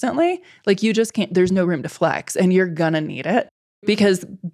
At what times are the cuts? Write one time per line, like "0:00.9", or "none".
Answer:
none